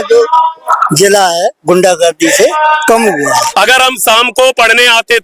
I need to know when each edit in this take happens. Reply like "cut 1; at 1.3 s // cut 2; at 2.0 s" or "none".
cut 1; at 3.5 s